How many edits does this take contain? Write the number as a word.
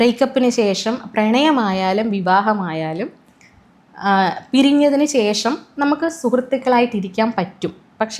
zero